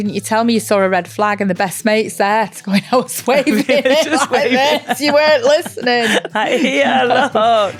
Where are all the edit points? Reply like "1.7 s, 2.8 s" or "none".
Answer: none